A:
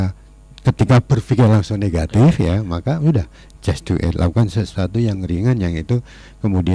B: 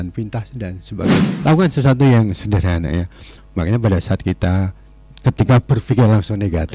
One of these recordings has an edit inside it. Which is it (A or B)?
B